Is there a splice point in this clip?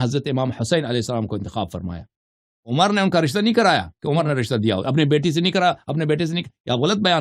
no; 0 cuts

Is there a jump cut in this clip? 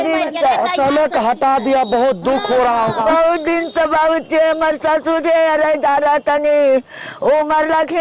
yes; 1 cut; at 3.0 s

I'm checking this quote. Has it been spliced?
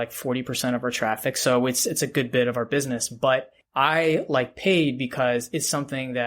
yes; 1 cut; at 3.6 s

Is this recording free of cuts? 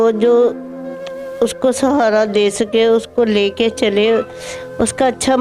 yes; 0 cuts

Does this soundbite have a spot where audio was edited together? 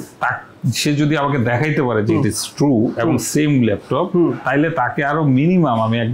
no; 0 cuts

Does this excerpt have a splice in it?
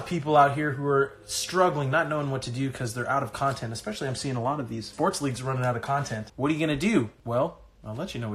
yes; 3 cuts; at 4.9 s, 6.2 s, 7.2 s

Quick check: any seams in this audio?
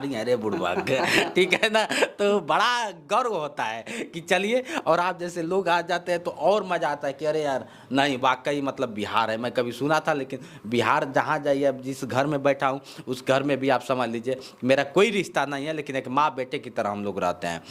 no; 0 cuts

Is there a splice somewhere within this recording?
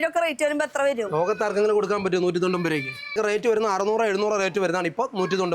yes; 1 cut; at 3.2 s

